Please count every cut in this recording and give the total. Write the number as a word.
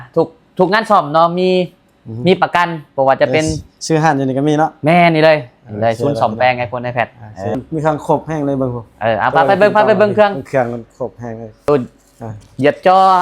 two